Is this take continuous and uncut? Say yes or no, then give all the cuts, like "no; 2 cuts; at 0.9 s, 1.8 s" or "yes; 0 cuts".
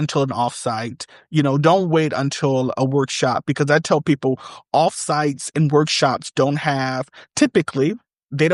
yes; 0 cuts